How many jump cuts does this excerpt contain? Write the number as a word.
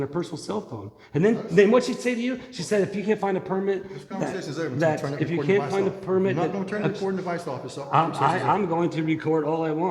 zero